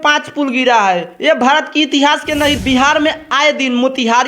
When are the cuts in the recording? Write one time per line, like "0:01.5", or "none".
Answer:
0:02.6

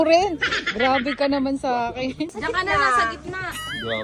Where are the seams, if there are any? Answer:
0:02.3

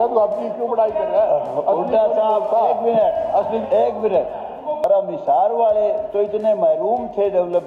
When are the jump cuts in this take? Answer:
0:04.8

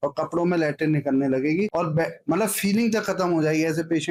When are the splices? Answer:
none

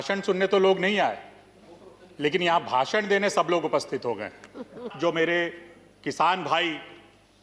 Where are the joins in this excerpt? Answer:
0:04.9

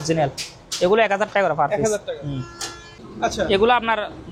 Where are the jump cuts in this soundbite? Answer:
none

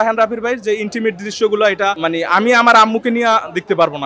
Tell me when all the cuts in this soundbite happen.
0:02.0

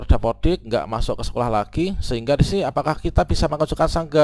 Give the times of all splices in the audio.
none

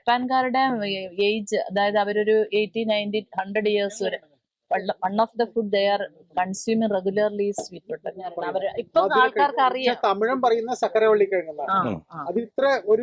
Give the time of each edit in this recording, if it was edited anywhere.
none

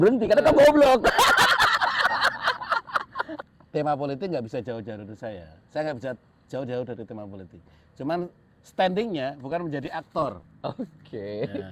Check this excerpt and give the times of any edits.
0:03.5

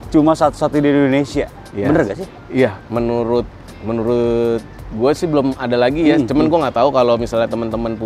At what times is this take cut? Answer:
none

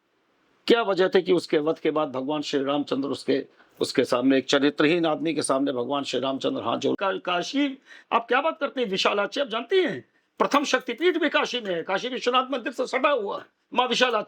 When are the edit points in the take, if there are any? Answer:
0:07.0

